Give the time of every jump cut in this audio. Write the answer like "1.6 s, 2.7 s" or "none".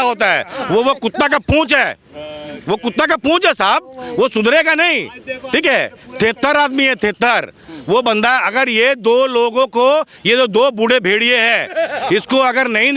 none